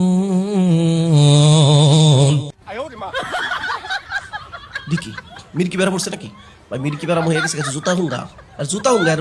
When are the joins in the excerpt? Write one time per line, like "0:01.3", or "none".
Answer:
0:02.5